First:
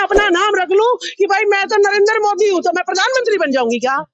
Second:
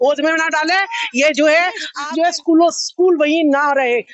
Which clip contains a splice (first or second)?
second